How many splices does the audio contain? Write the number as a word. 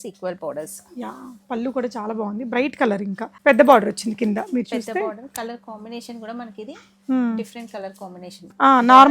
one